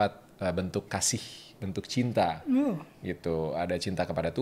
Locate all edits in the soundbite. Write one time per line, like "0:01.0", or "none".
none